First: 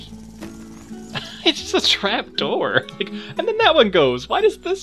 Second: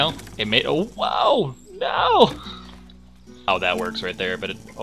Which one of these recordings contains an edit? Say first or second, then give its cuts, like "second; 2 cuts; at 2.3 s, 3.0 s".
second; 1 cut; at 3.4 s